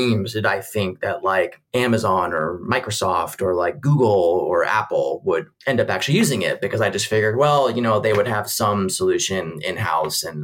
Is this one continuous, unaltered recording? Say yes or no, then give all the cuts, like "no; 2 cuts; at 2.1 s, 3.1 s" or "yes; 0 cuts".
yes; 0 cuts